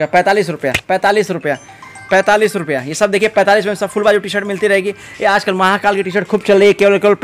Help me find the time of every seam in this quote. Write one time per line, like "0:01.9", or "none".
none